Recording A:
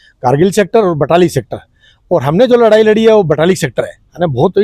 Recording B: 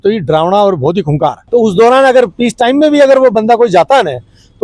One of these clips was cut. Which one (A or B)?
B